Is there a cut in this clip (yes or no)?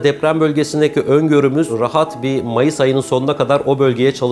no